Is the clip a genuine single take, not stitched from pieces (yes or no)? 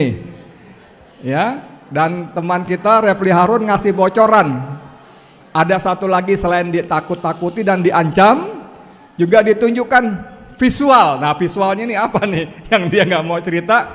yes